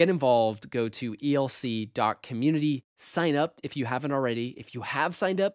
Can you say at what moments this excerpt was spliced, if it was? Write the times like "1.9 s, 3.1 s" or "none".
none